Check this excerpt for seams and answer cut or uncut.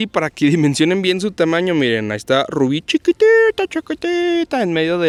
uncut